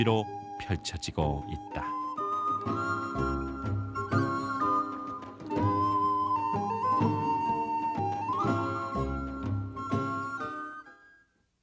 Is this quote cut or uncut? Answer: uncut